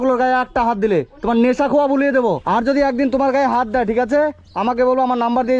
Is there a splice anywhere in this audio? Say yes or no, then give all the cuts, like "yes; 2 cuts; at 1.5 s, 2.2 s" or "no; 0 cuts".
yes; 1 cut; at 2.4 s